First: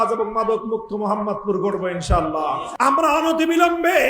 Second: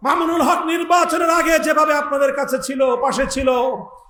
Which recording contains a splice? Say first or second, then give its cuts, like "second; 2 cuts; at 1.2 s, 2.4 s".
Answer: first; 1 cut; at 2.7 s